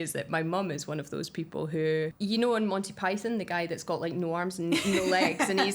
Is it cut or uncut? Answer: cut